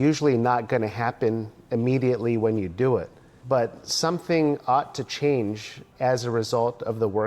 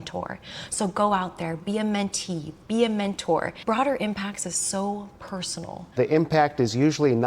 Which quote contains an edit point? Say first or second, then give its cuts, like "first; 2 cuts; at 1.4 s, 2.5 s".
second; 2 cuts; at 3.5 s, 5.8 s